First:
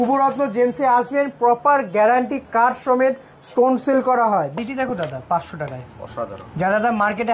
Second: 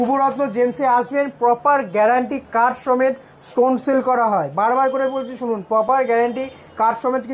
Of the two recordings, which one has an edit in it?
first; 1 cut; at 4.6 s

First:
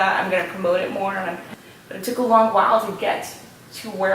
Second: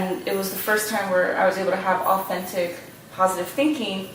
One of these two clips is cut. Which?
first; 1 cut; at 1.4 s

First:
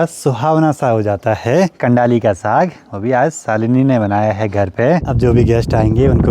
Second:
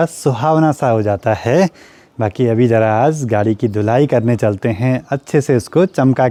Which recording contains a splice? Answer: first; 2 cuts; at 1.8 s, 5.1 s

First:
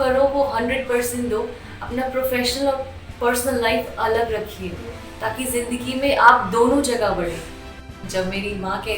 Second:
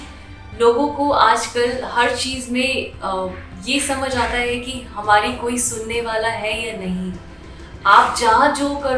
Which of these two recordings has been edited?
first; 1 cut; at 7.6 s

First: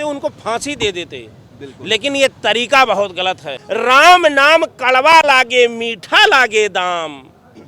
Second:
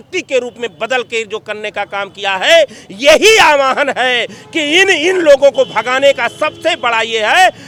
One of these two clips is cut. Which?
first; 1 cut; at 3.5 s

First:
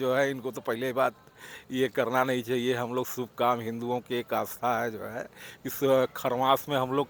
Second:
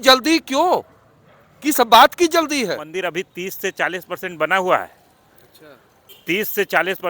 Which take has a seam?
second; 1 cut; at 2.9 s

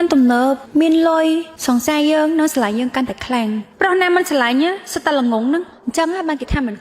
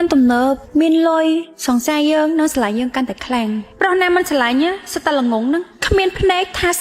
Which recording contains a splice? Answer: first; 1 cut; at 5.8 s

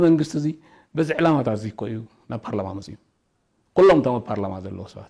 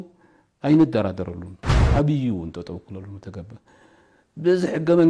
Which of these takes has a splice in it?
second; 1 cut; at 1.8 s

